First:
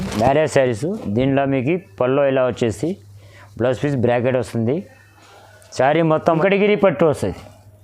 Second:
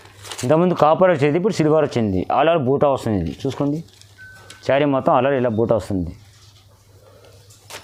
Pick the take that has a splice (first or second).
first